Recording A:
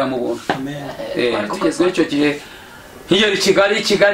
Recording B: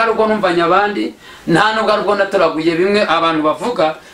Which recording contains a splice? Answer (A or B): A